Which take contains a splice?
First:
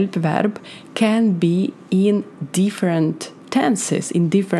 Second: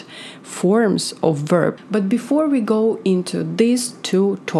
second; 1 cut; at 1.8 s

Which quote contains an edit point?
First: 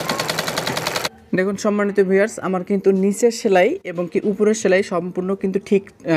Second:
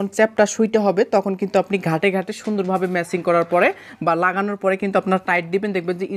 first; 1 cut; at 1.1 s

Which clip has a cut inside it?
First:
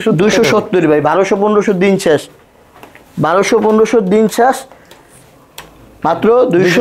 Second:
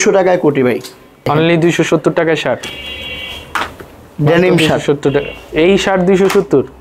second; 2 cuts; at 1.3 s, 2.6 s

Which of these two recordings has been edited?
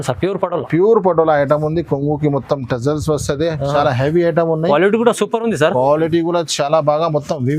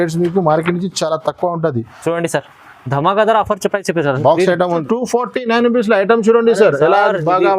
second; 1 cut; at 4.8 s

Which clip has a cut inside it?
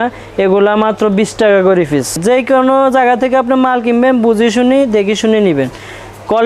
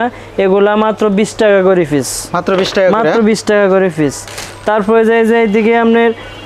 first; 1 cut; at 2.2 s

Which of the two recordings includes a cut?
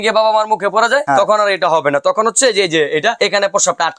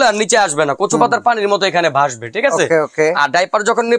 first; 2 cuts; at 1.0 s, 3.2 s

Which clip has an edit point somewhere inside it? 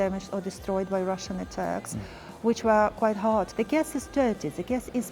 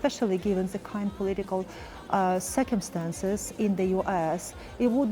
first; 1 cut; at 3.5 s

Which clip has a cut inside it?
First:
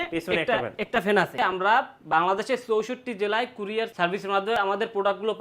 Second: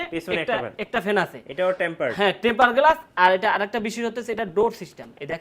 first; 2 cuts; at 1.3 s, 4.4 s

